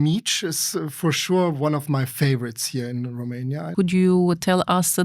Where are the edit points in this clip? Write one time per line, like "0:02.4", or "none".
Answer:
0:03.7